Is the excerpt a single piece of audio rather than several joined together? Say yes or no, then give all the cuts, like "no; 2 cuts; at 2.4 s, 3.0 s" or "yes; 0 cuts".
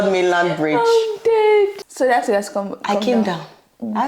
yes; 0 cuts